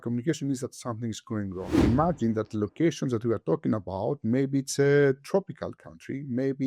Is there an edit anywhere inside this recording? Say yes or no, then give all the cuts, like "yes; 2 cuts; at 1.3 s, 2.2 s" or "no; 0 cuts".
yes; 1 cut; at 1.8 s